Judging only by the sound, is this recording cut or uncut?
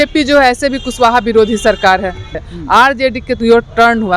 cut